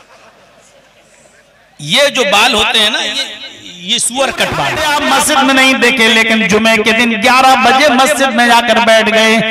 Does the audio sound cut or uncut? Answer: cut